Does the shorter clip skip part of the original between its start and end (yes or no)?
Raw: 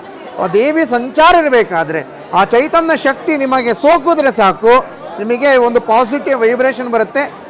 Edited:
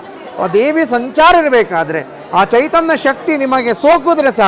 no